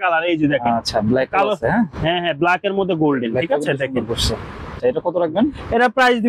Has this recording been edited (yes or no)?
yes